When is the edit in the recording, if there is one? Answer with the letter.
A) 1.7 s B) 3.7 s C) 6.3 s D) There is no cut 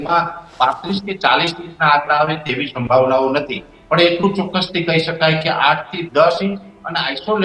D